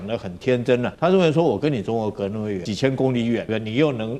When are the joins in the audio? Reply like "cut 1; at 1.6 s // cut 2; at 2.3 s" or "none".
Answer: cut 1; at 0.9 s // cut 2; at 2.7 s // cut 3; at 3.5 s